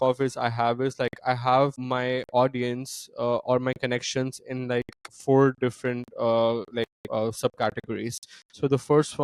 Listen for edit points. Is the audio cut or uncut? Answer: uncut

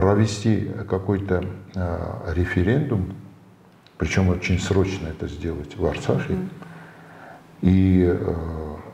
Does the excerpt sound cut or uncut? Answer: uncut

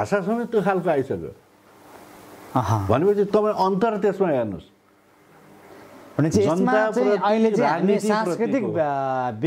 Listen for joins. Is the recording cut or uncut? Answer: uncut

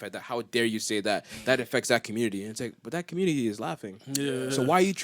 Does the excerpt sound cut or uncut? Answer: uncut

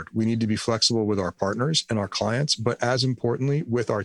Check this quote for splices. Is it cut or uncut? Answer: uncut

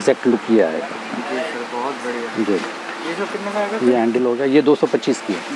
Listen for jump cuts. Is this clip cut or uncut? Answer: uncut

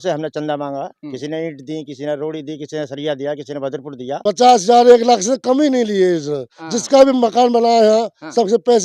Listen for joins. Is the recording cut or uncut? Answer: cut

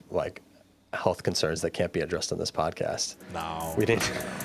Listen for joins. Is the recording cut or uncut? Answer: uncut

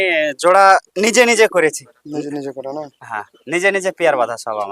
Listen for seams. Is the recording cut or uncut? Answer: uncut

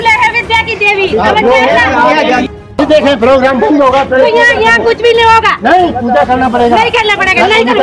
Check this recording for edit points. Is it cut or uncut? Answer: cut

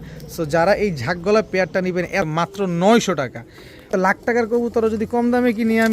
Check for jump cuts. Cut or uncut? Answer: cut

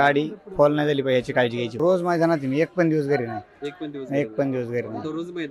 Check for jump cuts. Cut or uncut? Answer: cut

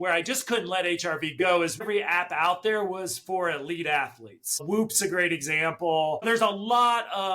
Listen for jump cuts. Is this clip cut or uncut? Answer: cut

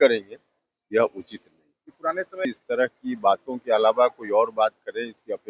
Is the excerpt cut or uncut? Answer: cut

